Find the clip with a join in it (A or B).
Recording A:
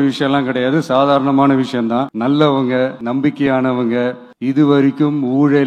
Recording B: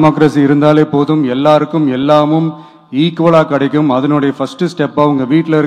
A